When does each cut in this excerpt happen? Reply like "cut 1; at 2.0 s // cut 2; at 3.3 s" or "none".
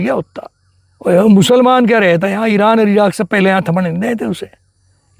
none